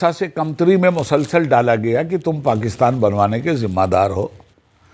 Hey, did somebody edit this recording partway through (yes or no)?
no